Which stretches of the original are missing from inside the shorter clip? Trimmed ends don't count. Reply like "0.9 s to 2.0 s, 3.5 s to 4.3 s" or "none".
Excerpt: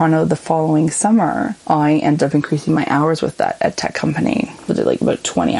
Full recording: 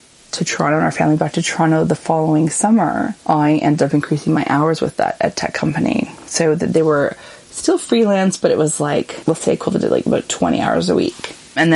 6.2 s to 9.7 s